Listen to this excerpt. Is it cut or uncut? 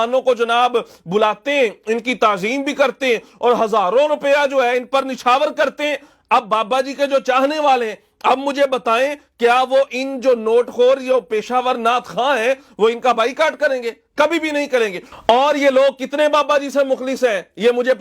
cut